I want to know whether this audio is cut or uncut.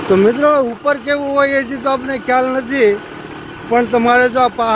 uncut